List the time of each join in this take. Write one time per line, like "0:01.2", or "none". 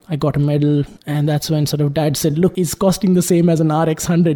0:01.0
0:02.5